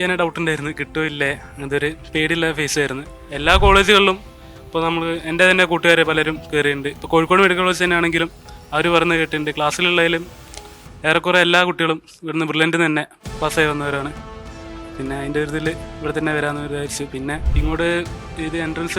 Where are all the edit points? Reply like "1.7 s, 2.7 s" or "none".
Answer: 3.2 s, 17.5 s

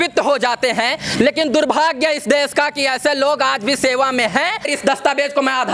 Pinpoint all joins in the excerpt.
4.7 s

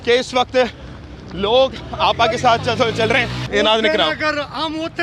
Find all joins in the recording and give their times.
3.4 s

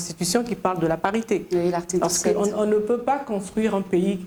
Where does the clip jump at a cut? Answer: none

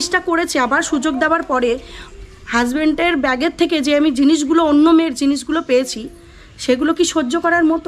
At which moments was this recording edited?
none

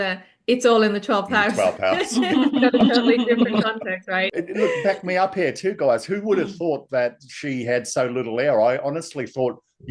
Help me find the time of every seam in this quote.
4.3 s

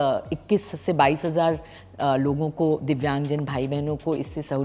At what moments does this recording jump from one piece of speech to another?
none

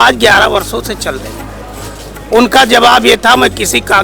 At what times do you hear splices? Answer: none

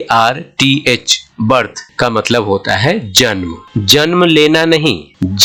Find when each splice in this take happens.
none

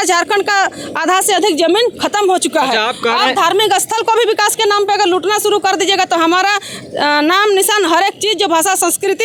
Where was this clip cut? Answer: none

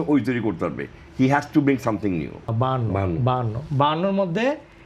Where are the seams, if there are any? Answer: 2.5 s

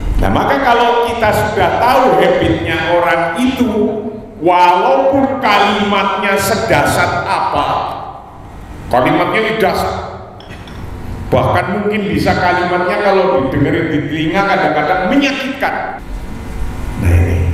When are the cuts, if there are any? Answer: 16.1 s

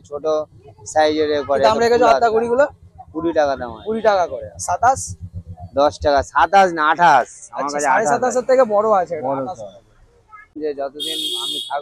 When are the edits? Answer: 10.5 s

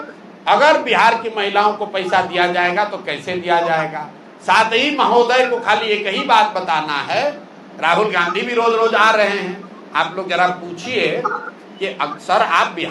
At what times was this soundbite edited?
none

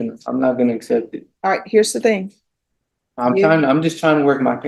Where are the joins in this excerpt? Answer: none

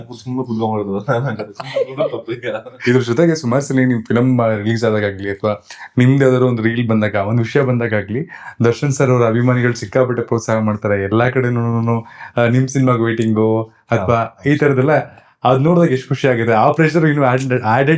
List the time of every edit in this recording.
2.7 s

